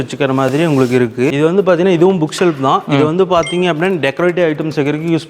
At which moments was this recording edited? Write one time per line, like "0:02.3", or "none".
0:01.3